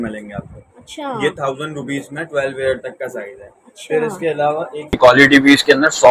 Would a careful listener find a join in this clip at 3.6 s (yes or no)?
no